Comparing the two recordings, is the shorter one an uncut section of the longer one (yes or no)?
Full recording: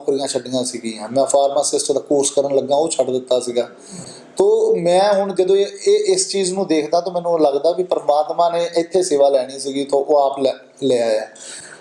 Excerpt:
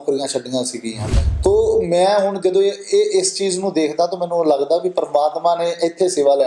no